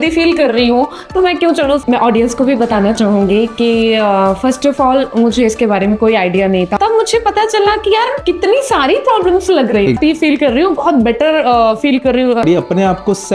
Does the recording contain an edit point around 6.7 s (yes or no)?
yes